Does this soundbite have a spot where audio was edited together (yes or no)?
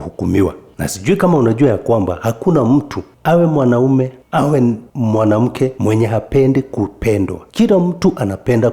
no